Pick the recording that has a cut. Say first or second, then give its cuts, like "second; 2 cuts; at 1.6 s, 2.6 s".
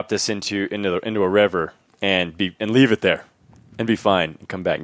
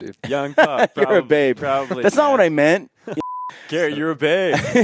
second; 1 cut; at 3.2 s